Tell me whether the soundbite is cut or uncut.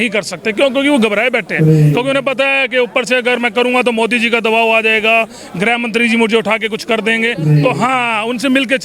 uncut